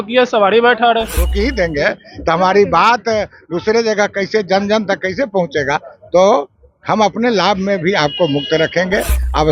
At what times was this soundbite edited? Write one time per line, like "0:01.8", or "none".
0:01.3

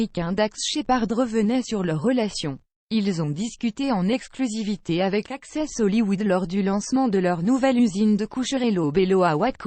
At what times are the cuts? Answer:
0:02.7

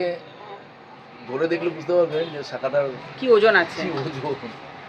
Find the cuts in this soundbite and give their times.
none

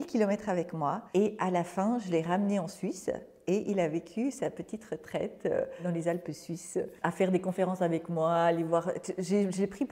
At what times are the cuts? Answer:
none

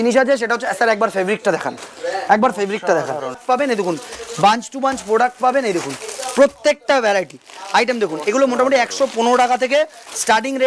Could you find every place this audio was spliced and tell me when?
0:03.4

